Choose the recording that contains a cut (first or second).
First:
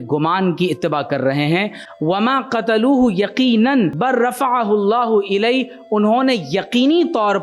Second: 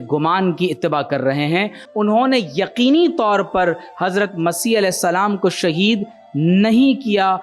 second